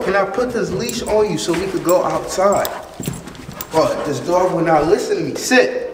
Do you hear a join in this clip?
no; 0 cuts

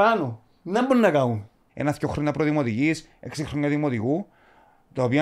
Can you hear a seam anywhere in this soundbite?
yes; 1 cut; at 1.7 s

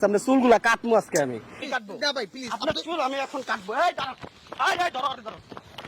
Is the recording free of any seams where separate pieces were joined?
no; 1 cut; at 1.6 s

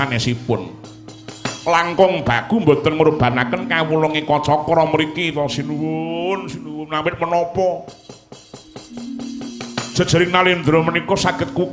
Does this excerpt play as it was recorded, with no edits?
yes; 0 cuts

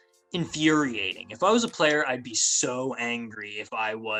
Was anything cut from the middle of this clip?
no; 0 cuts

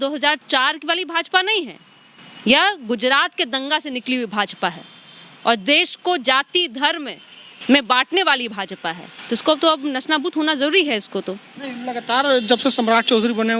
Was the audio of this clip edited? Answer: no; 0 cuts

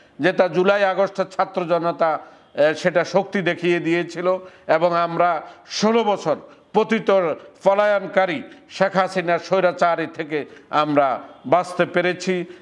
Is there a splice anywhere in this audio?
no; 0 cuts

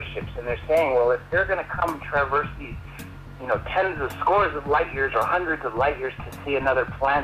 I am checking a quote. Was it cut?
yes; 1 cut; at 5.7 s

